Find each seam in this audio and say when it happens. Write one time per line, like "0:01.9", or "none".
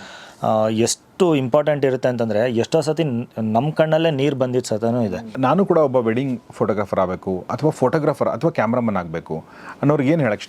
0:05.3